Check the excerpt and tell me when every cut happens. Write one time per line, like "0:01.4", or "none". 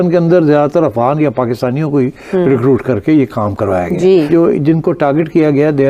none

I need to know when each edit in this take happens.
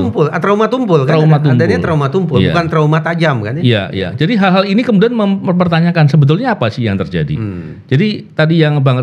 none

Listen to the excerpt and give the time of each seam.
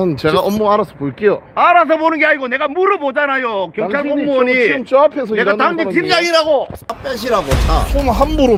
none

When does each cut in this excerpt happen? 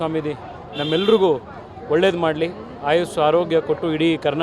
none

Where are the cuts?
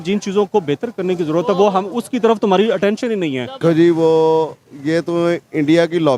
0:03.6

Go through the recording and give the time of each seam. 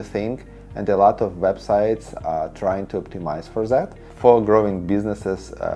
0:04.0

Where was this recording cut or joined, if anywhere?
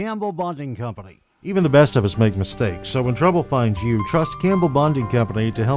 0:01.5

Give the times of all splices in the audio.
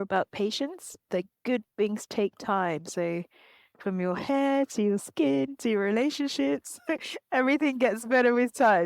0:01.1

